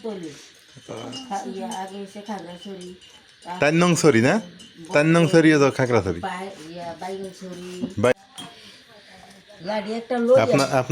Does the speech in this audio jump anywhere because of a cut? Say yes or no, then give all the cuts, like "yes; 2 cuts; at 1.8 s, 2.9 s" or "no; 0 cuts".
yes; 1 cut; at 8.1 s